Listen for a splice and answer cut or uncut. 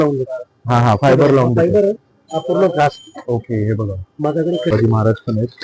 cut